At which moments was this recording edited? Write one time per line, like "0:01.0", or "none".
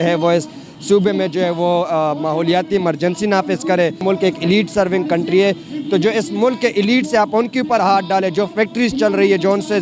0:04.0

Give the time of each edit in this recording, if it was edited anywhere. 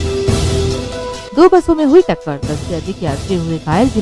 0:01.2

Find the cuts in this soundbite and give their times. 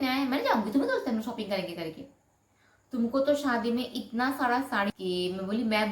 0:04.9

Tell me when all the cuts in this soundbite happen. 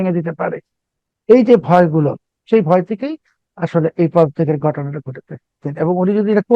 0:02.3
0:05.7

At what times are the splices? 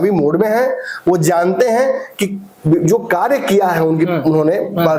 none

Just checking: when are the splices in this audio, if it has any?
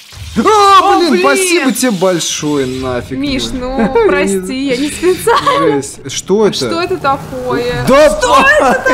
0:06.0

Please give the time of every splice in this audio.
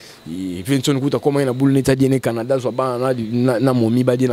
none

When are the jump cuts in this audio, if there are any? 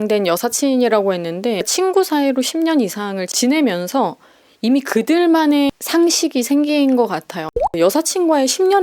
0:07.6

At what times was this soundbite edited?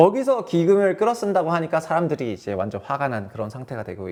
none

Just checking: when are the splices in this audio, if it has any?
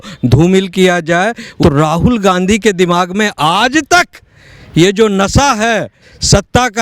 0:01.5

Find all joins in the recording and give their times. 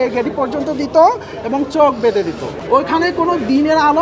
0:02.5

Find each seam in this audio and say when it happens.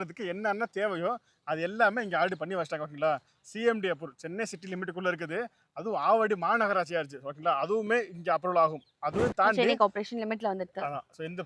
none

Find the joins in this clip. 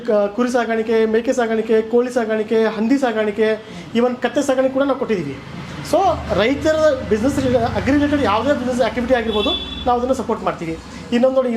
none

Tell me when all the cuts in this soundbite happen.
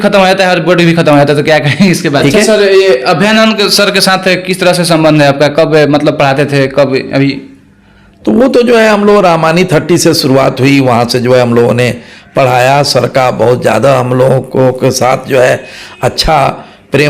0:02.2

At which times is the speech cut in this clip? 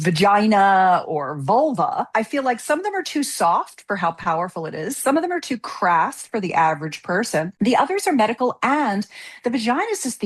0:02.1
0:07.5

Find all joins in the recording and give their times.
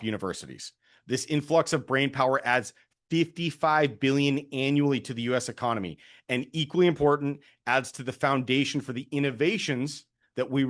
none

